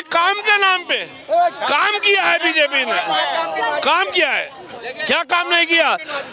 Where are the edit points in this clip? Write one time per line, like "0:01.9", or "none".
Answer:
none